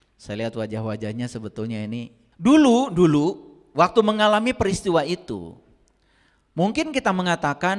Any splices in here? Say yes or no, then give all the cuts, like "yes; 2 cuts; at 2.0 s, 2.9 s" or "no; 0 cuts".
yes; 1 cut; at 2.2 s